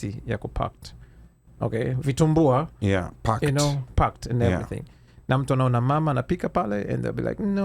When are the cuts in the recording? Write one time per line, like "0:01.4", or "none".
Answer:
none